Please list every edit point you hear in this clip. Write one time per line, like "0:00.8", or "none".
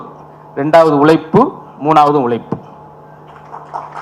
none

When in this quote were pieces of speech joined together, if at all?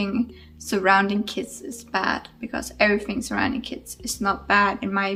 none

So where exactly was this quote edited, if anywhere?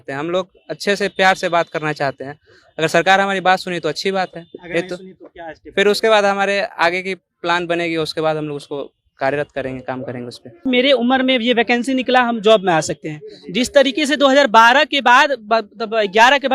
0:10.6

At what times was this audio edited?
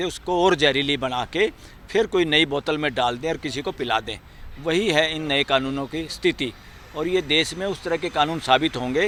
none

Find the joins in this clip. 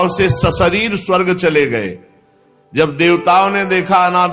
none

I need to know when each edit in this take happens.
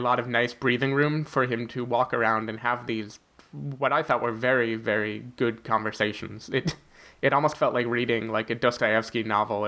none

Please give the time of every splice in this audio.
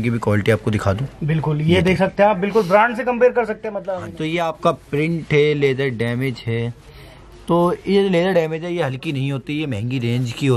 0:03.8

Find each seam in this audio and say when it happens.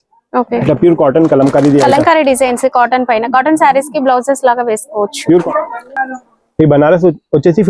0:05.4

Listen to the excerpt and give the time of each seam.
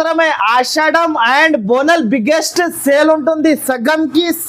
none

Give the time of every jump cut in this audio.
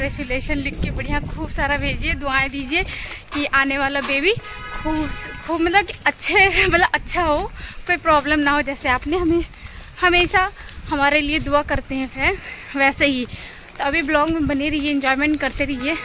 none

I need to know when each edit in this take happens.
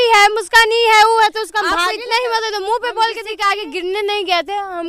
0:01.7
0:03.3

